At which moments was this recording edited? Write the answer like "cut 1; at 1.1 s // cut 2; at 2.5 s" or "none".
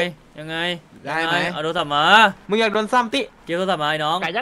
none

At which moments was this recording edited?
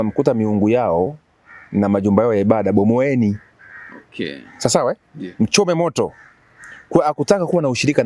none

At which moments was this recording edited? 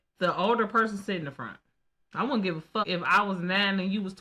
cut 1; at 2.8 s

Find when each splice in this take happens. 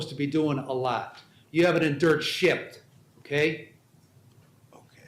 cut 1; at 1.7 s

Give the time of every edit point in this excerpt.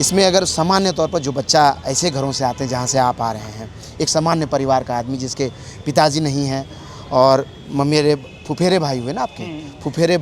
none

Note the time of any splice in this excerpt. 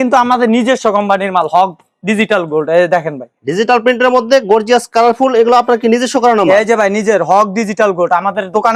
none

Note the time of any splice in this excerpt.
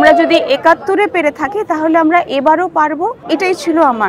cut 1; at 3.2 s

